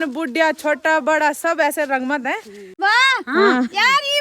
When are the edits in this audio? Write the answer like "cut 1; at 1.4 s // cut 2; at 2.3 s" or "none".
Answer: cut 1; at 2.6 s